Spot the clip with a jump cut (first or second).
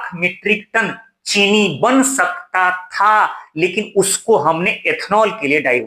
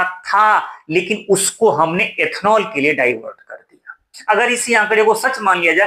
second